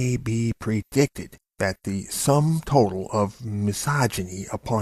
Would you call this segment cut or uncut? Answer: uncut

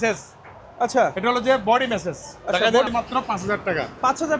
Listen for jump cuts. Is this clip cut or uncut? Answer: cut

